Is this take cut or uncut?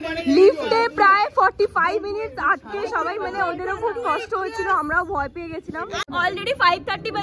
cut